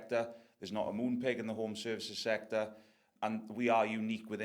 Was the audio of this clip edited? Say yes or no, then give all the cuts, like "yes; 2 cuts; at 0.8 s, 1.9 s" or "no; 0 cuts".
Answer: yes; 1 cut; at 3.0 s